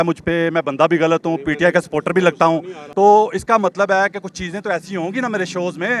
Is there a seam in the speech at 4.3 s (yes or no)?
no